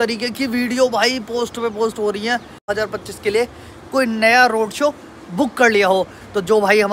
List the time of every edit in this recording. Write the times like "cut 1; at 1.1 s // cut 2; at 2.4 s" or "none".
cut 1; at 2.7 s